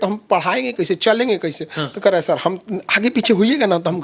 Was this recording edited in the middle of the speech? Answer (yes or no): no